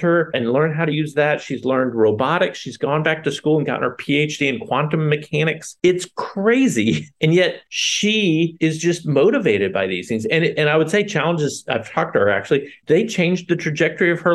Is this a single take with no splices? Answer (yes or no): yes